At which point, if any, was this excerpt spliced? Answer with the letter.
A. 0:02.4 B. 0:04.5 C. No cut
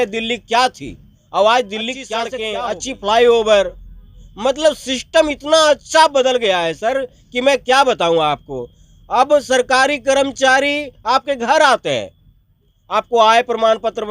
A